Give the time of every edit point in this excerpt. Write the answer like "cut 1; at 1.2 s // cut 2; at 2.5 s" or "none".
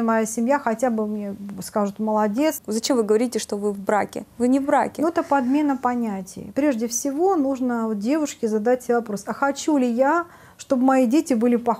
cut 1; at 2.6 s // cut 2; at 6.3 s